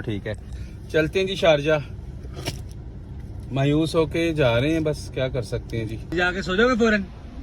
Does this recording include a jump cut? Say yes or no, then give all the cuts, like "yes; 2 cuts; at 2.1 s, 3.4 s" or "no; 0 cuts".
yes; 1 cut; at 6.1 s